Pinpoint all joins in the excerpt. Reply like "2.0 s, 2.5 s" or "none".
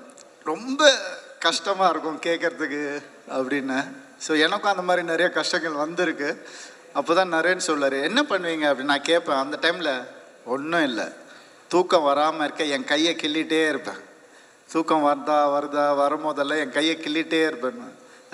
none